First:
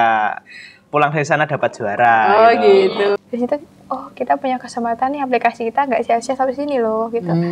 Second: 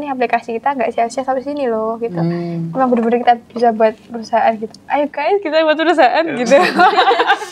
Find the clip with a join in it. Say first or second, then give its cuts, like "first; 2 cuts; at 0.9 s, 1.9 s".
first; 1 cut; at 3.2 s